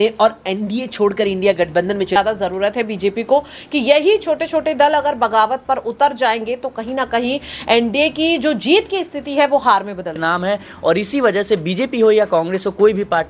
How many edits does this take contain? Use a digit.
2